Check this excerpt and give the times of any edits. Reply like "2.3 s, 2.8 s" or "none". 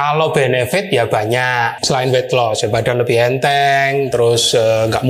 1.7 s